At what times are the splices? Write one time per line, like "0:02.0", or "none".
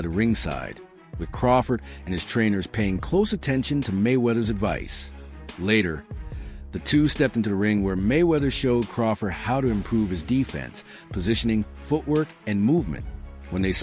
none